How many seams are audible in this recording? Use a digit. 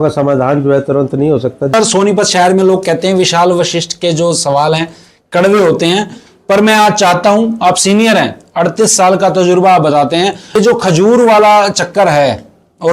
2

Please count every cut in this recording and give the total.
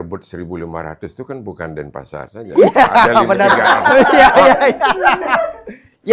0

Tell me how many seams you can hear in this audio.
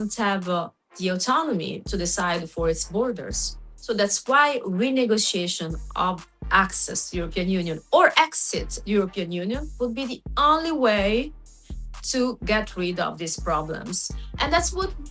0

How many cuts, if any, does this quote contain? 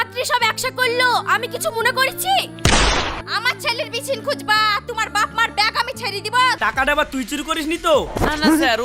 1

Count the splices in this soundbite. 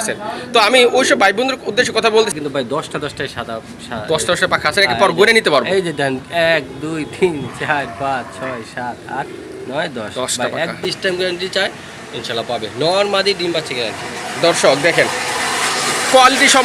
2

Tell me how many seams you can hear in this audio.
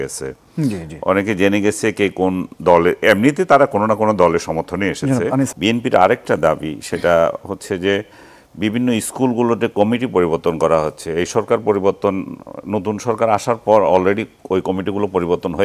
1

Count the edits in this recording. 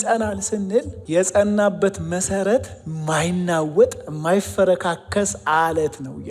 1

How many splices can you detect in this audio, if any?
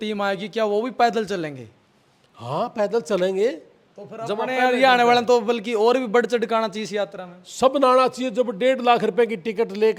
0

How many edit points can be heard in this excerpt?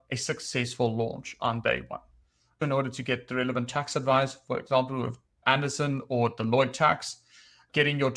1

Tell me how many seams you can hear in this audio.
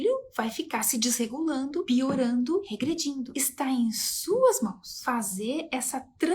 1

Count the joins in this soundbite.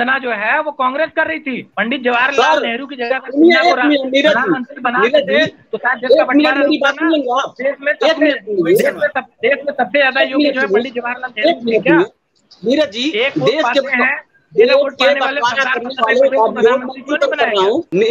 0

